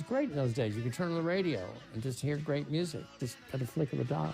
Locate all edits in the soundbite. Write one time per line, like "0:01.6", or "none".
0:03.2

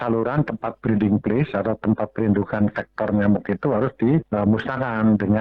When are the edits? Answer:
none

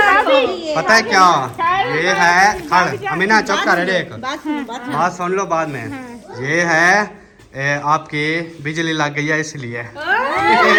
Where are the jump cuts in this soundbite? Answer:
none

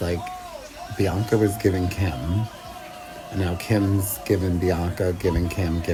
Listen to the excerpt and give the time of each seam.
none

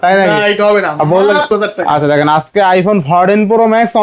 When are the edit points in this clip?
0:01.5

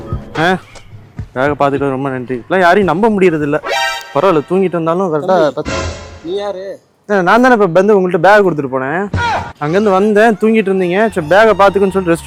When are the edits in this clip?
none

